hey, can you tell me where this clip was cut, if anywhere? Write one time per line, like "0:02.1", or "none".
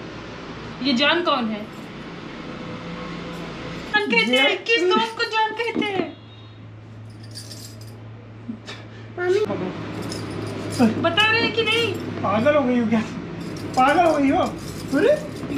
0:03.9
0:09.5

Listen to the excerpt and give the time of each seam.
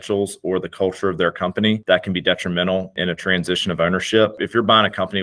0:01.8
0:02.9
0:04.4

